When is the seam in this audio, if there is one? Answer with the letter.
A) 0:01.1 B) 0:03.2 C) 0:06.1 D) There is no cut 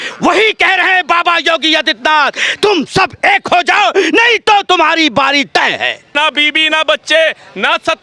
C